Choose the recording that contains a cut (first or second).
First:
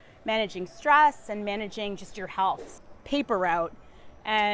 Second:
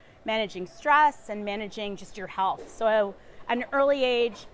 first